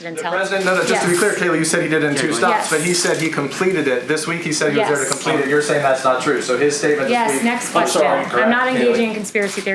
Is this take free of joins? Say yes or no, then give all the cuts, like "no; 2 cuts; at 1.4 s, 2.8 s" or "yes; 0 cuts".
yes; 0 cuts